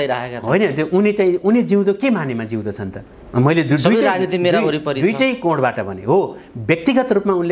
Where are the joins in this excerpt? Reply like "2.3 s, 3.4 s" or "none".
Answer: none